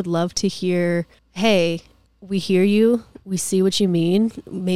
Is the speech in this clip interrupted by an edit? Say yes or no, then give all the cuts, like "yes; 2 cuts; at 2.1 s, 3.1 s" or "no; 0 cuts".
yes; 1 cut; at 1.2 s